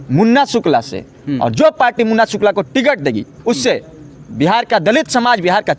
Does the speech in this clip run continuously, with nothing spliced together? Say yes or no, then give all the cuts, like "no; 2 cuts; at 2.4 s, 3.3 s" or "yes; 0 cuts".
yes; 0 cuts